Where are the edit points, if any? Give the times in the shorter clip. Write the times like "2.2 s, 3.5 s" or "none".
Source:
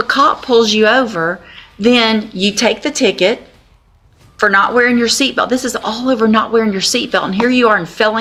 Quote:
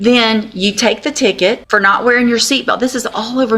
1.6 s